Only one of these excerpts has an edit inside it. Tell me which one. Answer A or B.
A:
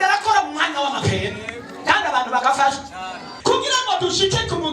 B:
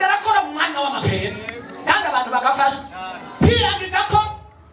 A